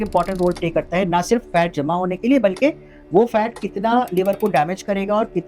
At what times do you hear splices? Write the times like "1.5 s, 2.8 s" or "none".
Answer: none